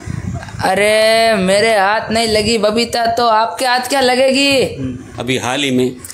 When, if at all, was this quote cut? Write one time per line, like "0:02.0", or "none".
0:05.1